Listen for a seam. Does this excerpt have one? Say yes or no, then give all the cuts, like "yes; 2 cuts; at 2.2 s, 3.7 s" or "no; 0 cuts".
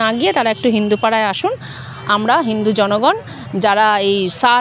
no; 0 cuts